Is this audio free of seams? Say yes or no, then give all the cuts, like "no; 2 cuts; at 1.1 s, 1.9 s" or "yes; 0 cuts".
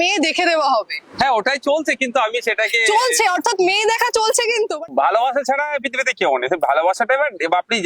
no; 1 cut; at 4.8 s